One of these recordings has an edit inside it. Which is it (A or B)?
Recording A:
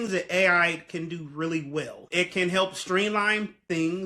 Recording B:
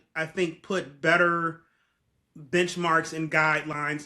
A